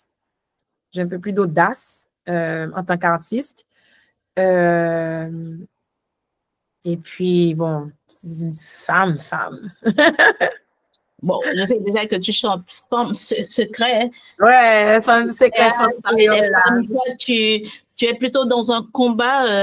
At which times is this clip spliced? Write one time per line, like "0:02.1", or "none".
none

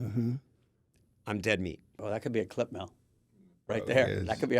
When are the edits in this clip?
0:02.0

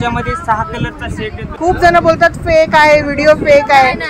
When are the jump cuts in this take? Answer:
0:01.6

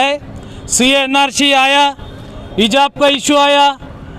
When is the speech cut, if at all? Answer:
none

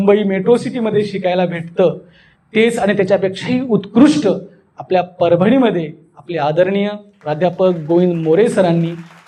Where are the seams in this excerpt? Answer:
none

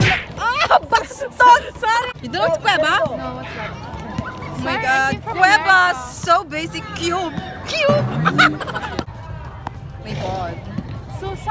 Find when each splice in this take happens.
0:02.2
0:09.1

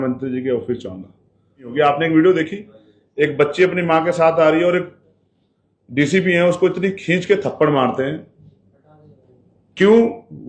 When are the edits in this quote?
0:01.7

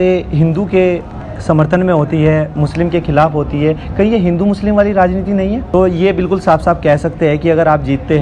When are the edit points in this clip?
0:05.6

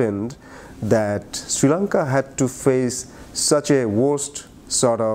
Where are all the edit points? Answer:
none

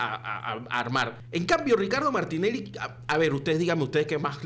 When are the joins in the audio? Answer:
0:01.2

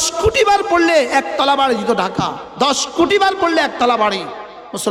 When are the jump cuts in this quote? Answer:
none

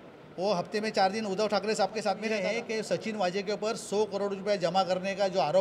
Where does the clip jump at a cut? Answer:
0:02.3

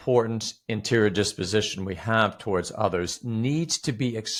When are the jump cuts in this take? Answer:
none

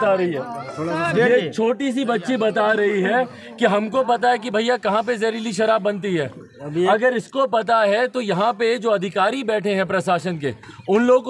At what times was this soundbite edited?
none

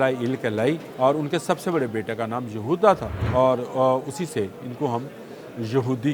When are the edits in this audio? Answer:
0:00.9
0:03.1

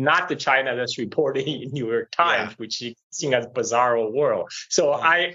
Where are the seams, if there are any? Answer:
none

